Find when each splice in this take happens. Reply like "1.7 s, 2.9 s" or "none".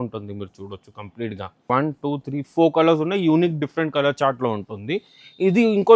1.7 s